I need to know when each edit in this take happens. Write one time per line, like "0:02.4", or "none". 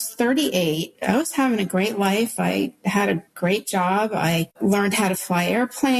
0:00.9
0:04.5